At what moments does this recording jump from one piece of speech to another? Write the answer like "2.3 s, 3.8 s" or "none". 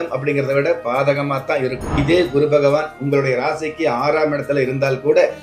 1.9 s